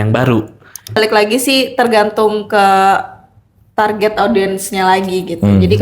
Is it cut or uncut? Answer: cut